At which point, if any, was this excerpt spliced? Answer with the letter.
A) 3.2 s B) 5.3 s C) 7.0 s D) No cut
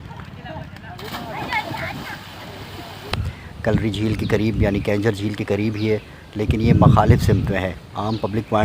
A